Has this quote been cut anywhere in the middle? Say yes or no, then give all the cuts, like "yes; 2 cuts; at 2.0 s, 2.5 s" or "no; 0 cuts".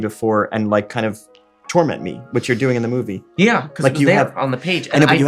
no; 0 cuts